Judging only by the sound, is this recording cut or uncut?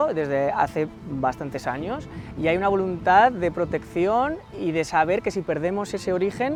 uncut